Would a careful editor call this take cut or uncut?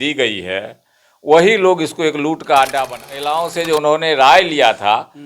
cut